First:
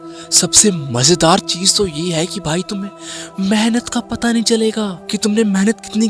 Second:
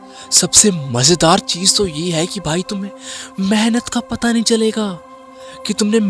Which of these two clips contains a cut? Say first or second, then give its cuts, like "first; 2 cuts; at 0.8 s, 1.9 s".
first; 1 cut; at 5.0 s